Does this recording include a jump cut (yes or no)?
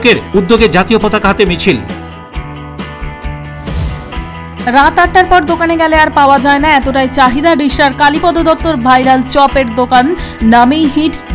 no